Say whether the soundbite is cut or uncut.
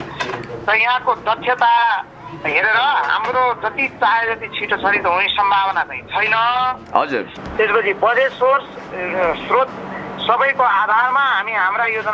cut